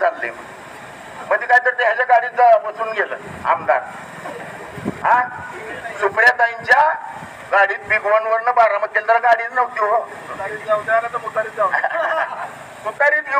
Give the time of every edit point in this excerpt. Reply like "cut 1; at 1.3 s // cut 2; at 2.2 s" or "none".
cut 1; at 12.5 s